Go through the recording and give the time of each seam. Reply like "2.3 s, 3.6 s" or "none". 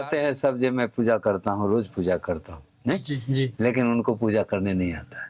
none